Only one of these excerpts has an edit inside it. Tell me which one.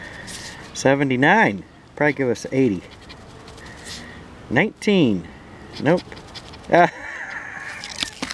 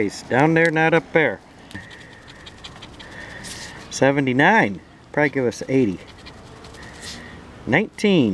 second; 1 cut; at 1.7 s

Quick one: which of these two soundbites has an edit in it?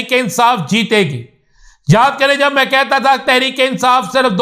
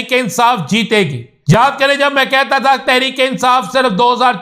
second; 1 cut; at 1.6 s

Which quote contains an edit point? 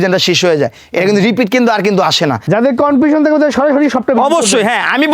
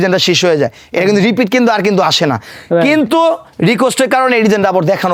first; 1 cut; at 2.4 s

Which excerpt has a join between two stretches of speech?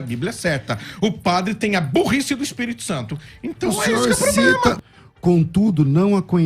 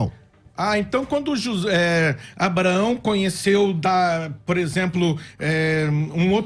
first; 1 cut; at 4.8 s

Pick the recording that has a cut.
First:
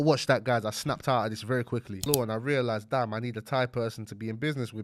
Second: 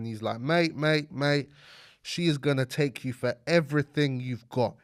first; 1 cut; at 2.0 s

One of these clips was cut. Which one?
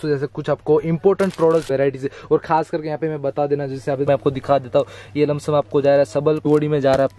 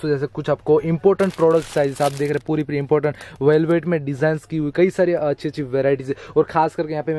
first; 3 cuts; at 1.7 s, 4.1 s, 6.5 s

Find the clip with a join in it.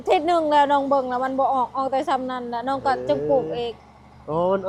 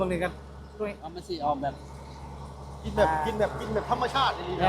second; 1 cut; at 1.1 s

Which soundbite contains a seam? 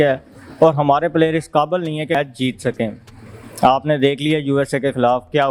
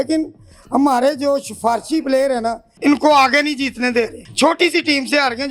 second; 1 cut; at 2.7 s

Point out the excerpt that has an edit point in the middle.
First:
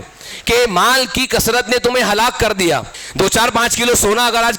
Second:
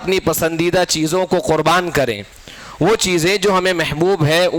first; 1 cut; at 3.0 s

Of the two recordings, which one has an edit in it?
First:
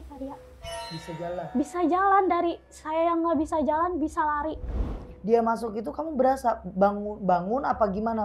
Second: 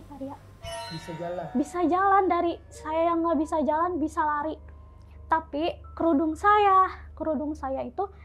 first; 1 cut; at 5.1 s

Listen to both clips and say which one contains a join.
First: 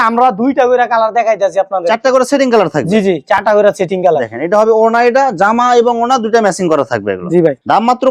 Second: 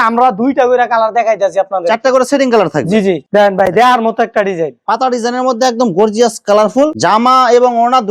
second; 2 cuts; at 3.2 s, 6.9 s

